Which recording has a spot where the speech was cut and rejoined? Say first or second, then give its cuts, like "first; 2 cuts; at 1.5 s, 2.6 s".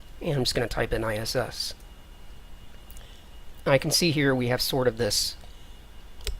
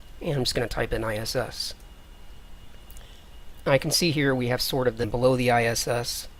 first; 1 cut; at 5.0 s